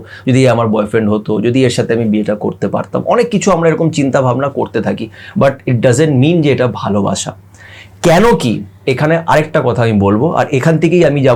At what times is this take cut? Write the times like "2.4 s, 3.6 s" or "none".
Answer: none